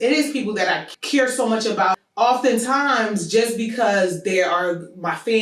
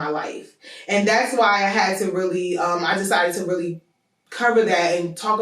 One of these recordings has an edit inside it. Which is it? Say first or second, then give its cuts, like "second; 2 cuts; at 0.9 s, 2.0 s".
first; 2 cuts; at 0.9 s, 2.0 s